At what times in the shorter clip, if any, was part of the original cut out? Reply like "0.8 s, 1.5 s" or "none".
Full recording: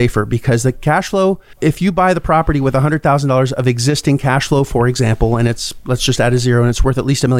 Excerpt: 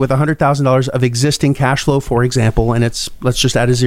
none